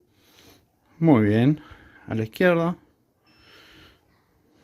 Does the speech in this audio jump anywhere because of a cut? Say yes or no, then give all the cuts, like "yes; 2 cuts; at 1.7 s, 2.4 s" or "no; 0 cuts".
no; 0 cuts